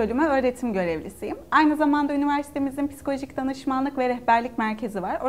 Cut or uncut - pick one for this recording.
uncut